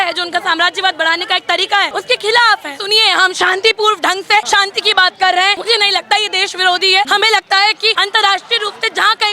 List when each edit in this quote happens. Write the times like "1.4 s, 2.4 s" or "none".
1.9 s, 2.8 s, 4.5 s, 5.6 s, 7.1 s, 7.9 s